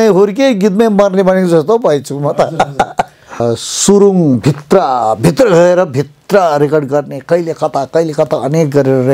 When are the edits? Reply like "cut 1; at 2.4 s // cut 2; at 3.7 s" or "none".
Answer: cut 1; at 3.4 s

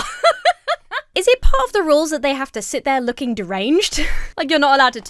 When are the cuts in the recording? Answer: cut 1; at 1.0 s

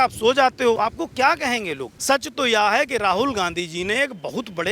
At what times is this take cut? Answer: cut 1; at 0.8 s // cut 2; at 1.9 s

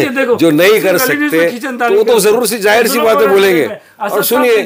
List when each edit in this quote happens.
none

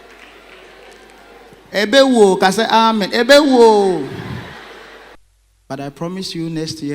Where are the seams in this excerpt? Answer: cut 1; at 5.1 s

